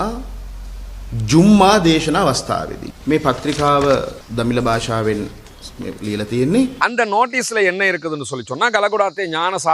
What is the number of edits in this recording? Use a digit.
1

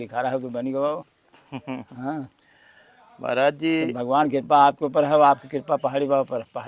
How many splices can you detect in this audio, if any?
0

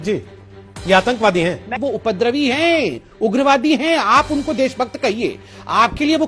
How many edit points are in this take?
1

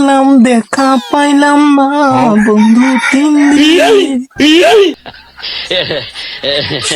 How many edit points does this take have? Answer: 0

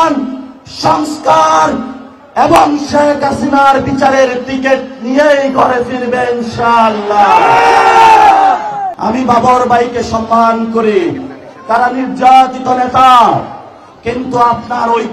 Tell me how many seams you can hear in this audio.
1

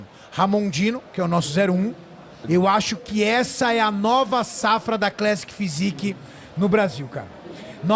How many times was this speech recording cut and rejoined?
1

